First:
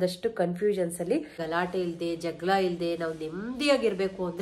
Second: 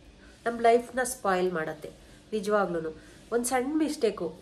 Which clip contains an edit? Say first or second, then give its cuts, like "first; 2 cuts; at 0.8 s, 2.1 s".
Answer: first; 1 cut; at 1.4 s